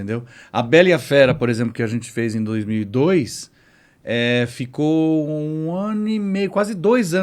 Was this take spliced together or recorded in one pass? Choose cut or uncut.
uncut